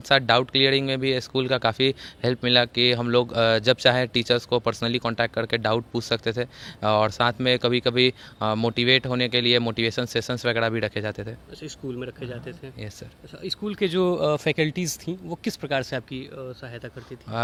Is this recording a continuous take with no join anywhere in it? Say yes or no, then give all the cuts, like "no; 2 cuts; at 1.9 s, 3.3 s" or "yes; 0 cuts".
yes; 0 cuts